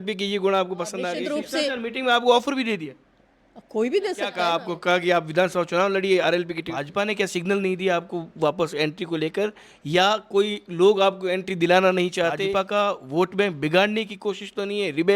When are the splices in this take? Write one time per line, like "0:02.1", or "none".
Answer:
0:01.1
0:04.4
0:06.8
0:12.4